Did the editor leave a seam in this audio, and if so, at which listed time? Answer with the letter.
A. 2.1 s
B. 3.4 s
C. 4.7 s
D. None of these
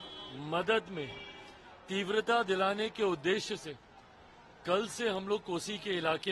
D